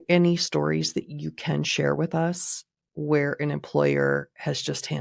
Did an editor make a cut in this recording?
no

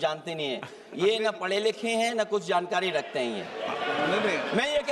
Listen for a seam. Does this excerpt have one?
no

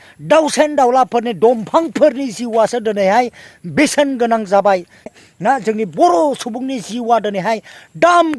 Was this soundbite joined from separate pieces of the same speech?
yes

